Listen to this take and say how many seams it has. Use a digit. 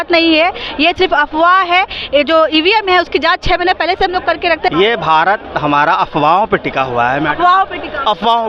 1